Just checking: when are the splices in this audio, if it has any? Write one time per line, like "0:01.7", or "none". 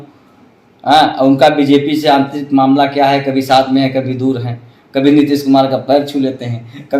none